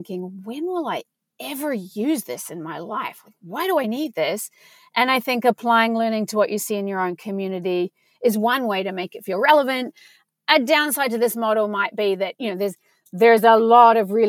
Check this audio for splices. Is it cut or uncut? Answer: uncut